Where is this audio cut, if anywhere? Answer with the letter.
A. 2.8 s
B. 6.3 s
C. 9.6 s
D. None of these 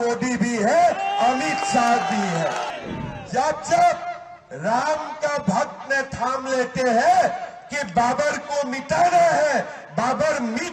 A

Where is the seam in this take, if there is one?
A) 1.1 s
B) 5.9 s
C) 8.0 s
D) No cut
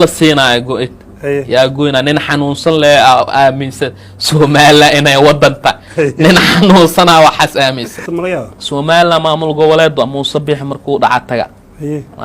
C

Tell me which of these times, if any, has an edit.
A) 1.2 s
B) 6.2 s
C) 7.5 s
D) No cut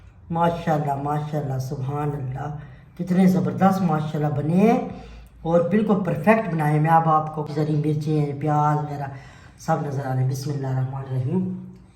C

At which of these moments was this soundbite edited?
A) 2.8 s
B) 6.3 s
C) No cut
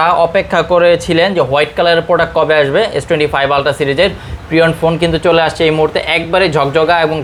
C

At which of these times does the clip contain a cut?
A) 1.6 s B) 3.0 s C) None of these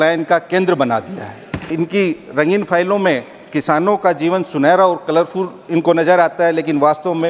A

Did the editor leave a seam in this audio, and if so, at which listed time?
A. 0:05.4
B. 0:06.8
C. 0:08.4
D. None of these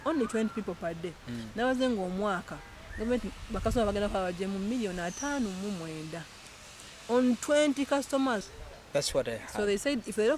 C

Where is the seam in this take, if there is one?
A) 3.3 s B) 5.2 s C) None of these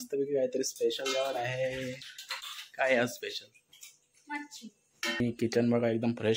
B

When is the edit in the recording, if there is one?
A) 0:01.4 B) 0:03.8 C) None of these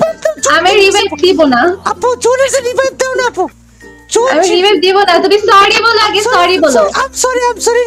B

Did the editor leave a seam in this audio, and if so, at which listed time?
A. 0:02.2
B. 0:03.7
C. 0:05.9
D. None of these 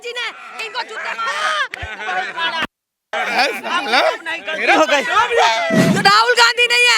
C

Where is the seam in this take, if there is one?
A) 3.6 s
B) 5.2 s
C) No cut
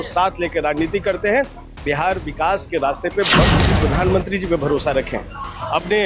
A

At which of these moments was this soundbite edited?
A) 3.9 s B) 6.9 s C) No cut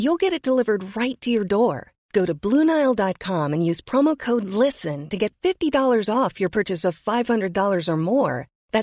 C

